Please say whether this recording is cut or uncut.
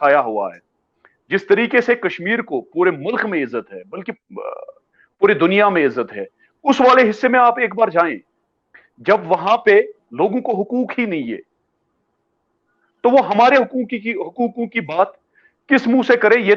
uncut